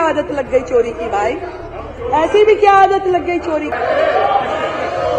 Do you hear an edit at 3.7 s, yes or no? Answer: yes